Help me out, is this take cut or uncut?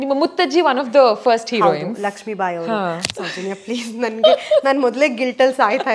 cut